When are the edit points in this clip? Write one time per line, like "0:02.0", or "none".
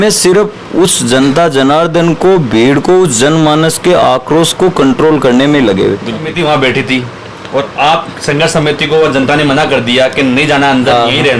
0:06.3